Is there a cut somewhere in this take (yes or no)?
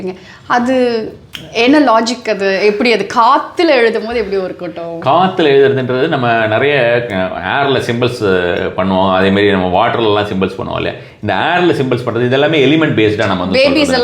no